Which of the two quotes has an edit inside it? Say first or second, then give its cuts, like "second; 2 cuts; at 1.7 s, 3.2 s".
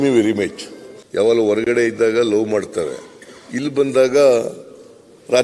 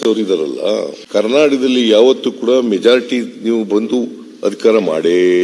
second; 1 cut; at 1.0 s